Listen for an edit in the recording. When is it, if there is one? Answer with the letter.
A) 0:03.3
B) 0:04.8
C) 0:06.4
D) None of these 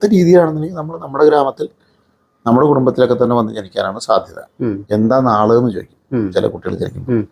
B